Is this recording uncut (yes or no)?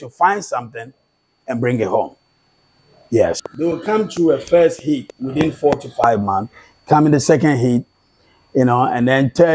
no